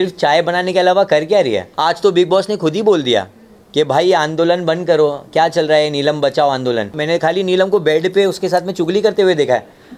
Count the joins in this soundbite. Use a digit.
2